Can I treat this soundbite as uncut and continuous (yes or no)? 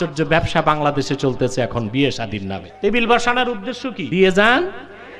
no